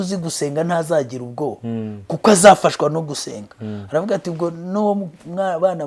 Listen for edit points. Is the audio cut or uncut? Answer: uncut